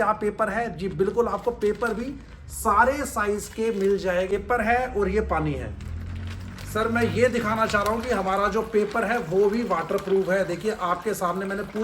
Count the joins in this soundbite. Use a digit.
1